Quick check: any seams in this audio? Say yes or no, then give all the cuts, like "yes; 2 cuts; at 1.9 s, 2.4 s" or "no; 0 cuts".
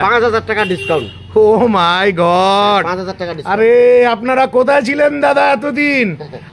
no; 0 cuts